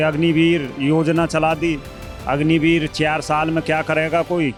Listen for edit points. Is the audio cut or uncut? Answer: uncut